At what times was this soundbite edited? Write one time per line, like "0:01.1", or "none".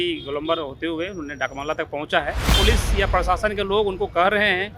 0:02.5

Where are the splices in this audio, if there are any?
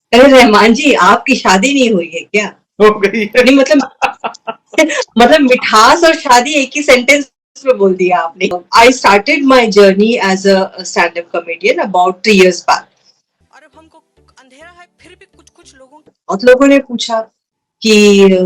0:08.6
0:16.2

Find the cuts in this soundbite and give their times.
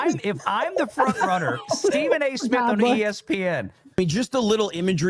0:04.0

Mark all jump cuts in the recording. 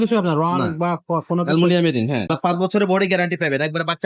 0:02.3

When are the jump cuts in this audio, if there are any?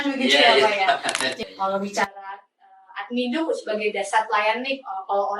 0:01.3

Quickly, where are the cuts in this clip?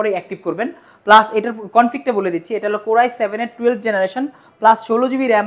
none

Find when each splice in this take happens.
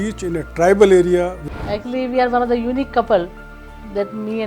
0:01.4

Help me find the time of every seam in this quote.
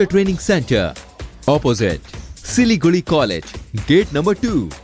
none

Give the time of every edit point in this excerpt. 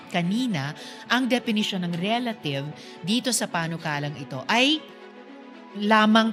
none

